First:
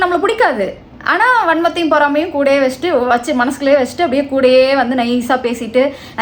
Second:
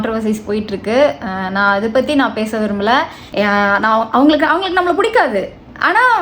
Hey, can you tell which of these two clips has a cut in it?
second; 1 cut; at 3.2 s

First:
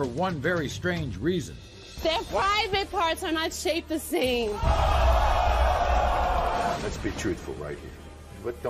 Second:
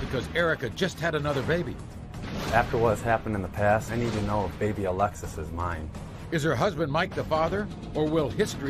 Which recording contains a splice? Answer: first; 1 cut; at 6.8 s

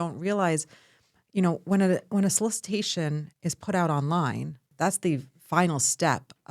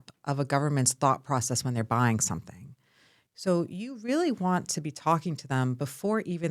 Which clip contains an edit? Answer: first; 1 cut; at 4.7 s

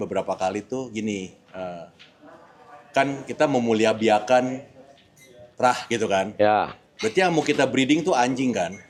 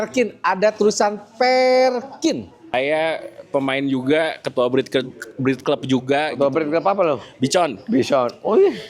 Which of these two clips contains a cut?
second; 1 cut; at 2.7 s

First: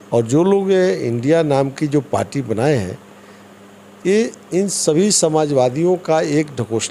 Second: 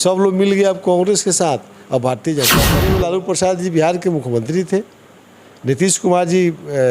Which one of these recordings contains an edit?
second; 1 cut; at 2.8 s

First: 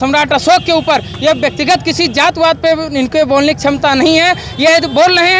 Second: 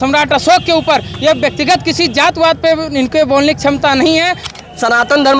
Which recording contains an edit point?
second; 1 cut; at 4.5 s

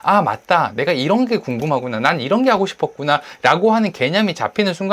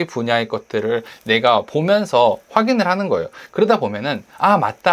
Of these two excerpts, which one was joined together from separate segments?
second; 1 cut; at 3.4 s

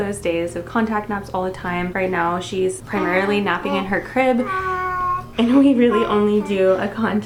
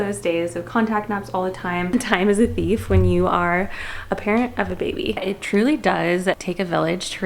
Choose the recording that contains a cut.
second; 2 cuts; at 1.9 s, 5.2 s

